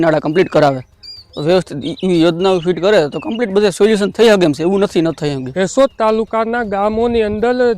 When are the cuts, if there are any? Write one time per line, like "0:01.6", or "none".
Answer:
0:05.4